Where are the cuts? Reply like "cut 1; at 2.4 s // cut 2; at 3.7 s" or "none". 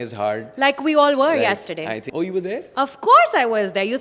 cut 1; at 2.1 s